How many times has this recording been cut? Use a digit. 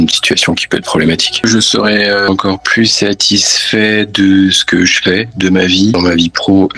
3